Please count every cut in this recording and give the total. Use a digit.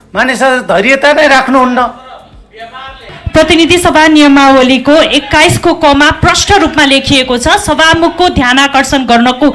1